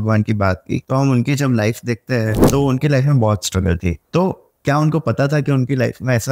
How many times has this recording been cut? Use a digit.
3